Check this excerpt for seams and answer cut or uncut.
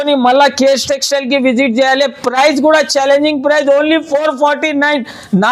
uncut